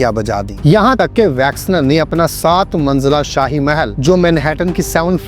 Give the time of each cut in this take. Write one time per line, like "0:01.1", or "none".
0:00.9
0:03.9